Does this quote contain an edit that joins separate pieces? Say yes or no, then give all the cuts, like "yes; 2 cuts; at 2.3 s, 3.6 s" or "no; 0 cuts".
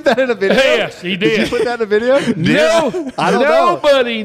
no; 0 cuts